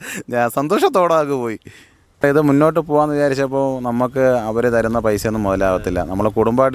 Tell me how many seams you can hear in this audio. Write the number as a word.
one